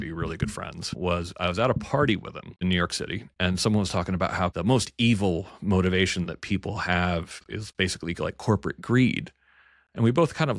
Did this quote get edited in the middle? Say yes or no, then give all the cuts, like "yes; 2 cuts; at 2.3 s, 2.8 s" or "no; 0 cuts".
yes; 4 cuts; at 1.0 s, 2.6 s, 4.5 s, 7.4 s